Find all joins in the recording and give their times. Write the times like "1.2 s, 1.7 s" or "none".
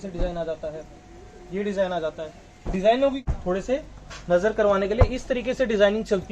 3.2 s